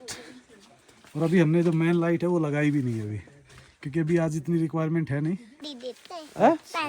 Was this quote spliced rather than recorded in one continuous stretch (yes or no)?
no